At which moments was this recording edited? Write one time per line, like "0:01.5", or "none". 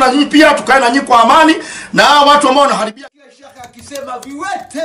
0:02.8